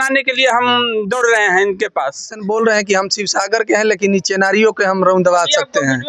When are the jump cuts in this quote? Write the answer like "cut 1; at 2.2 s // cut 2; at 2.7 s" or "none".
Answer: cut 1; at 2.4 s